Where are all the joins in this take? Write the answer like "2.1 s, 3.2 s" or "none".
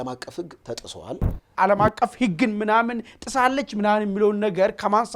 1.5 s